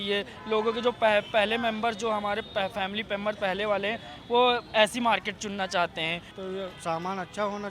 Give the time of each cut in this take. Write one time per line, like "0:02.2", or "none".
0:06.3